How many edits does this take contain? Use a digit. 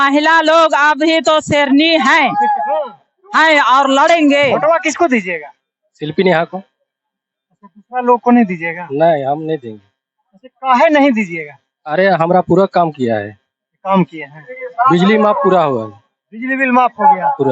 1